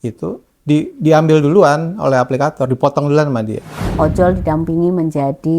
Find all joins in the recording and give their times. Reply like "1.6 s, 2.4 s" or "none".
3.9 s